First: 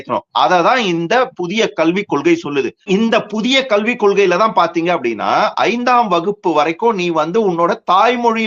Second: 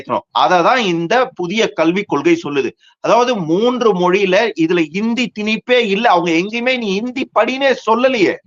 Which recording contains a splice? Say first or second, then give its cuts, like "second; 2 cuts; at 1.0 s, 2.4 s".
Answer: first; 1 cut; at 2.8 s